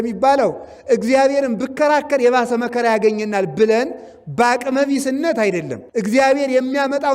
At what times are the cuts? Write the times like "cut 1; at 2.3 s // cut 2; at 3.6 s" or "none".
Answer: cut 1; at 5.8 s

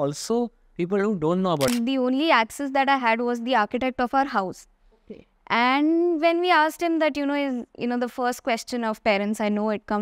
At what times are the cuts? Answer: cut 1; at 1.7 s

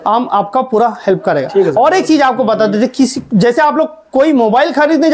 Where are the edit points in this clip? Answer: none

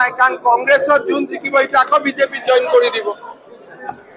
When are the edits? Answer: none

